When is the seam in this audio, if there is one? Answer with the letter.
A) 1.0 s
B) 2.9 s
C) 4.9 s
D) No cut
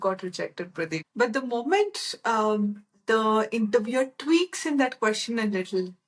A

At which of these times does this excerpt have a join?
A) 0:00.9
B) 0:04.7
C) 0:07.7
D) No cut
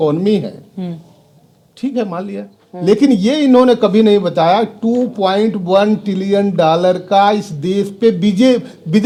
D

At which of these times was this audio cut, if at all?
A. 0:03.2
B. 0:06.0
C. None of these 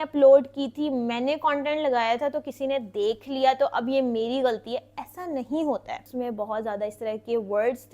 B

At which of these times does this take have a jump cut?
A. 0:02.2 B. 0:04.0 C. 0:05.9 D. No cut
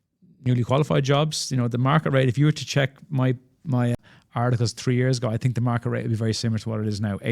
B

